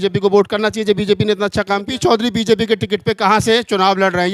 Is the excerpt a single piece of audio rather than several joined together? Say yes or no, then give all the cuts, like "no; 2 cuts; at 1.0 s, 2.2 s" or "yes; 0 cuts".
no; 1 cut; at 1.9 s